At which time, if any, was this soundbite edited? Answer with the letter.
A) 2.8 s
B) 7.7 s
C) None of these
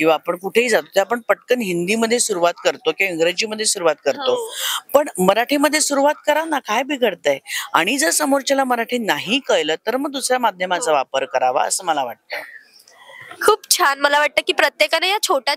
C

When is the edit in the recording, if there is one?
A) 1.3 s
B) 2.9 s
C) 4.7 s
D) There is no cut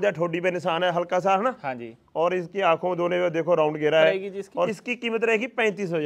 C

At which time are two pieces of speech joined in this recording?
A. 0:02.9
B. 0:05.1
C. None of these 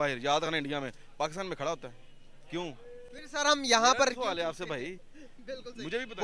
C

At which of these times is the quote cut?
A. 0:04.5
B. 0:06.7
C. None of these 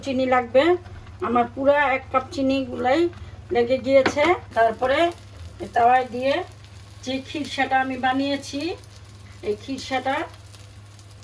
A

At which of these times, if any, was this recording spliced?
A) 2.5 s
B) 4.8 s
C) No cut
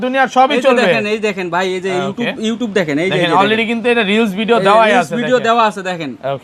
C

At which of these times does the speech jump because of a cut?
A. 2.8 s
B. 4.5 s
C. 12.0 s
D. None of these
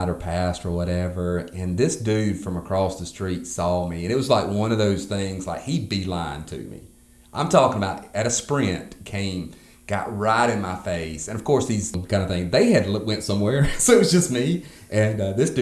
C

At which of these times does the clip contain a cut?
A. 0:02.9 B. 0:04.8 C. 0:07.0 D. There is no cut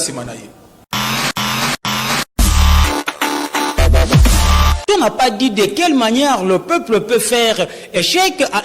B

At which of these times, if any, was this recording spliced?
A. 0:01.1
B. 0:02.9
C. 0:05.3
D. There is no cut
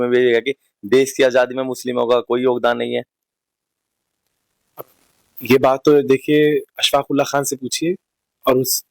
D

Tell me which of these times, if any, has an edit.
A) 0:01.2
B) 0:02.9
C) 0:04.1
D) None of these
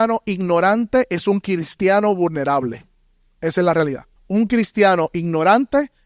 C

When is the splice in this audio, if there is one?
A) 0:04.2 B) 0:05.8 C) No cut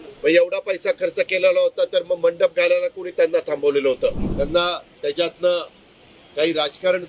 A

